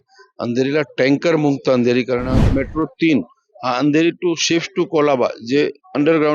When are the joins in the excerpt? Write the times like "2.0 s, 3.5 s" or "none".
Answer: 2.5 s